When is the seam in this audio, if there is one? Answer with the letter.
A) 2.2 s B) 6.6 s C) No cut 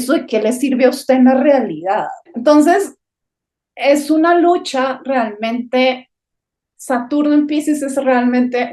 A